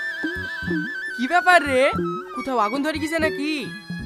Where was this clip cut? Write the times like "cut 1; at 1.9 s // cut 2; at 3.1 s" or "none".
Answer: none

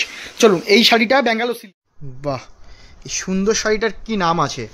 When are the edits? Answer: cut 1; at 1.7 s

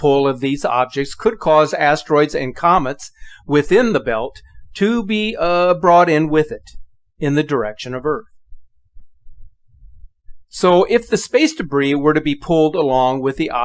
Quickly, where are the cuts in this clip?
cut 1; at 1.7 s

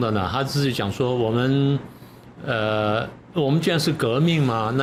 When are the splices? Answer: none

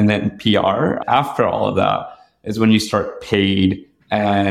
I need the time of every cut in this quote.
cut 1; at 1.0 s

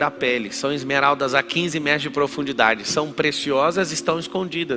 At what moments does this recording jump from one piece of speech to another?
none

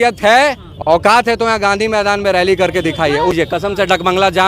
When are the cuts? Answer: cut 1; at 1.1 s // cut 2; at 3.3 s

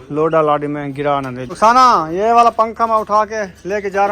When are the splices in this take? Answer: cut 1; at 1.4 s

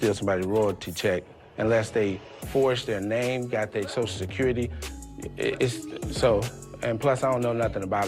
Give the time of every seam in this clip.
none

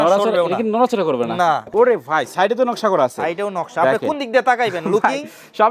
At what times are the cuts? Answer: cut 1; at 1.6 s

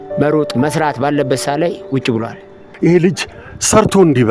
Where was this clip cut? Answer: cut 1; at 2.6 s

